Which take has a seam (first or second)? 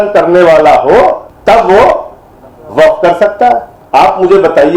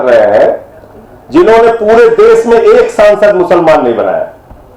first